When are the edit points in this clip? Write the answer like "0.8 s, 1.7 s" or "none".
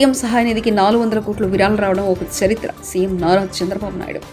none

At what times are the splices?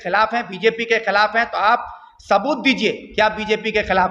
none

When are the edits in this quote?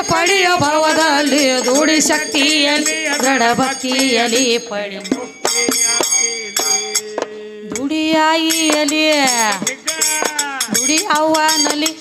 none

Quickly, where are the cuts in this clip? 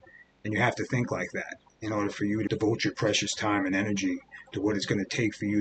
2.5 s

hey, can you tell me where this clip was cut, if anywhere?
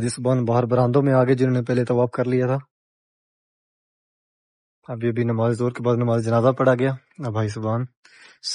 none

